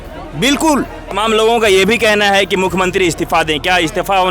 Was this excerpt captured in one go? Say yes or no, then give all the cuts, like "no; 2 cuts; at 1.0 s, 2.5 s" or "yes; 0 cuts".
no; 1 cut; at 1.1 s